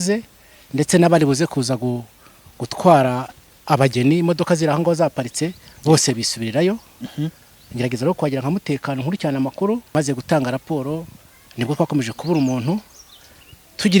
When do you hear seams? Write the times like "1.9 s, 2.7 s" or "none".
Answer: 9.9 s

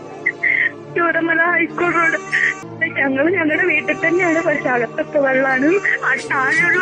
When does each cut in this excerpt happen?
2.6 s

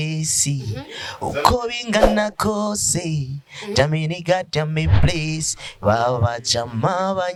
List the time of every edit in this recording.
none

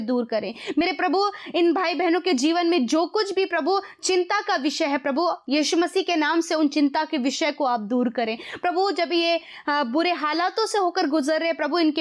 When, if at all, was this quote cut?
none

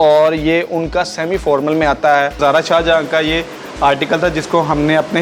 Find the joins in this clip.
2.4 s

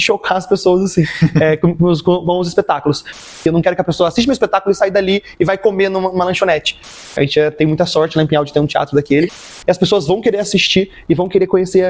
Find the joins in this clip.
3.2 s, 7.0 s, 9.5 s

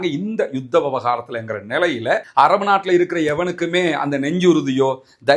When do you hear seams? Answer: 2.3 s

